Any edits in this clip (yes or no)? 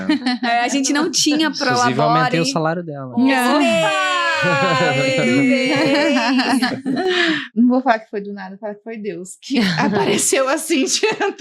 yes